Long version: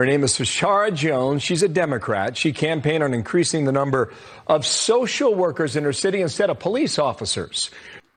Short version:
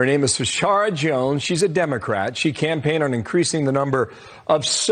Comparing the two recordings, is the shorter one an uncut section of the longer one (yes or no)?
yes